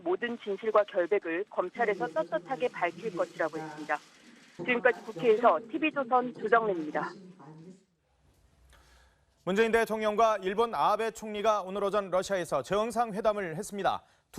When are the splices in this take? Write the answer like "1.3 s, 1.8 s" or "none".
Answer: 7.6 s